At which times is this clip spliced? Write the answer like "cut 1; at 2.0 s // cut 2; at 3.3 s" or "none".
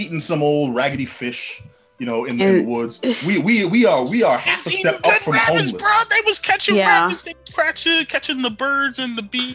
none

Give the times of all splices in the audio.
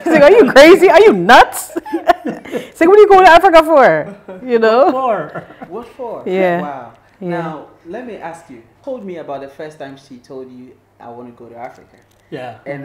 cut 1; at 8.7 s

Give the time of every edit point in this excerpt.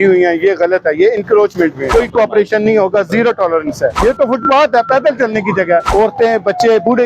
cut 1; at 1.8 s // cut 2; at 4.0 s // cut 3; at 5.9 s

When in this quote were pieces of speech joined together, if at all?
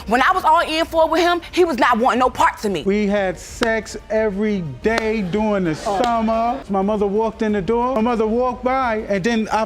cut 1; at 2.8 s // cut 2; at 7.9 s

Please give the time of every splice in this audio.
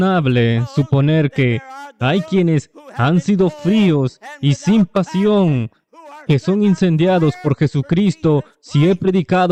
none

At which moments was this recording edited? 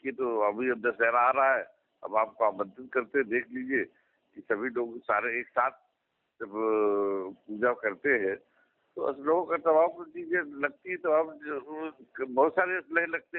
none

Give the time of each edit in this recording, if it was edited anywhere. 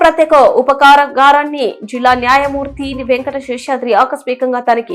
none

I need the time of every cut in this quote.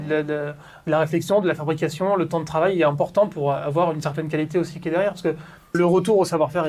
cut 1; at 5.8 s

